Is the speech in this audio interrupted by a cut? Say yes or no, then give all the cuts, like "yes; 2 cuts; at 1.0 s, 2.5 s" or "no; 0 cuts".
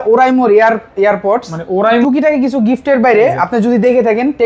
yes; 1 cut; at 2.0 s